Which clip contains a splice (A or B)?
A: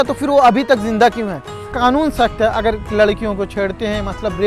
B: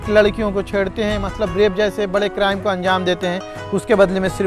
A